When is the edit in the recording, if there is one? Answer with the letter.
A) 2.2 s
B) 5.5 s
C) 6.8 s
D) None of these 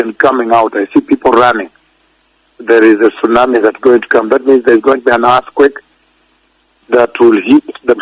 A